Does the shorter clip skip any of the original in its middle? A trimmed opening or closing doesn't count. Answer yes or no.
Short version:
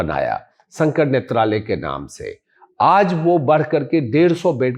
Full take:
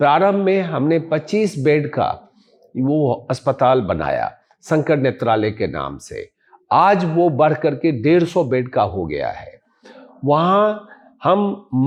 no